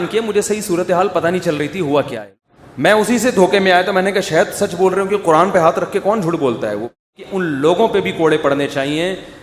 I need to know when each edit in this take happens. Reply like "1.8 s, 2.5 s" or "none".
2.2 s, 7.0 s